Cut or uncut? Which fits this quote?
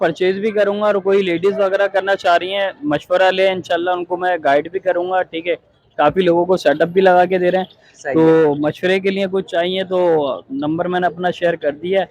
uncut